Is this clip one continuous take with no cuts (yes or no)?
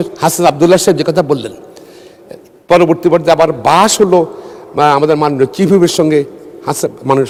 yes